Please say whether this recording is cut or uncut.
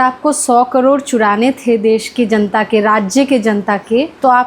uncut